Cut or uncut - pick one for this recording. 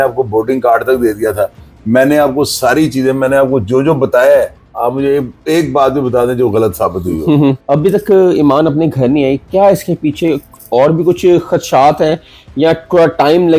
cut